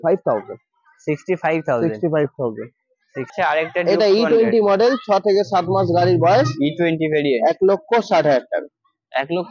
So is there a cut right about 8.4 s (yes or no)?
no